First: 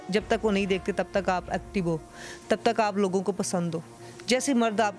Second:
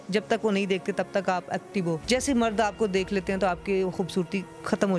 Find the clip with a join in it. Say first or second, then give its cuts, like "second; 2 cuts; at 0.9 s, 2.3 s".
second; 1 cut; at 2.0 s